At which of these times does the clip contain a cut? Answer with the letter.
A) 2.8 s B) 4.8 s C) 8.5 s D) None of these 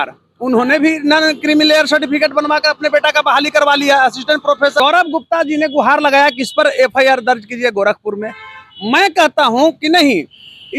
B